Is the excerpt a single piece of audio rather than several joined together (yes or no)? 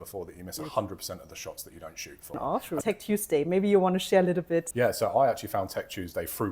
no